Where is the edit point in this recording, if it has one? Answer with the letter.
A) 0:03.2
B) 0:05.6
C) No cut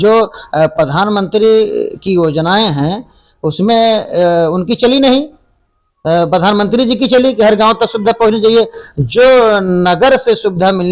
C